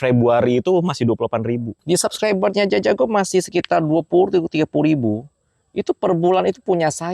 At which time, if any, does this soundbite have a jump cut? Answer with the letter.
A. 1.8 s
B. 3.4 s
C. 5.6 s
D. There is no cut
A